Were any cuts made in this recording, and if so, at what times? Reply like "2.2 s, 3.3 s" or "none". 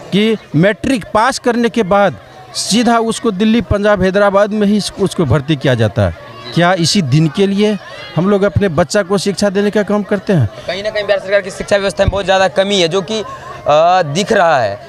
none